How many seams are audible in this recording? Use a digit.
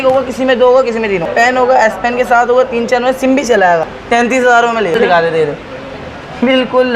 3